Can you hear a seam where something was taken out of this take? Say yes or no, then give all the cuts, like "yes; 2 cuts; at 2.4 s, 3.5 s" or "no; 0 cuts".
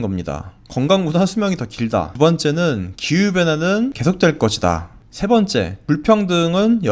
yes; 3 cuts; at 2.1 s, 4.0 s, 5.8 s